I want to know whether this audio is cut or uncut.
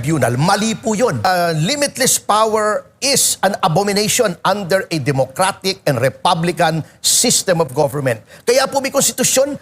cut